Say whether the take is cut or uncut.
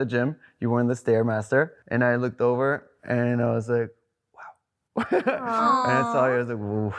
cut